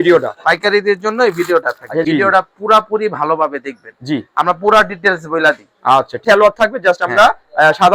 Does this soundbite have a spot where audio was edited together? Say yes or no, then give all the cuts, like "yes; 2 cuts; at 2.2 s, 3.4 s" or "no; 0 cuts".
yes; 2 cuts; at 2.0 s, 6.2 s